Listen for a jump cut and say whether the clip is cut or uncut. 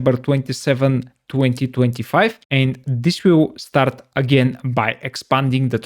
cut